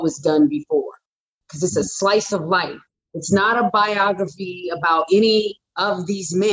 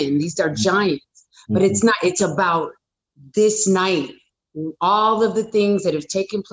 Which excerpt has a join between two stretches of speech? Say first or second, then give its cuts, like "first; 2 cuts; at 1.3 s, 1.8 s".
first; 1 cut; at 1.3 s